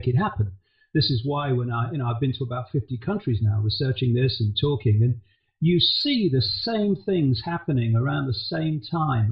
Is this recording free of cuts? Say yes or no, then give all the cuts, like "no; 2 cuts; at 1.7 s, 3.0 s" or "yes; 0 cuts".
no; 1 cut; at 7.1 s